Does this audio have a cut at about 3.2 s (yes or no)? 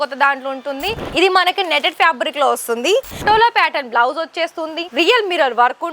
yes